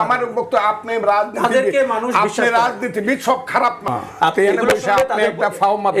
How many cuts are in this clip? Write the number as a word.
one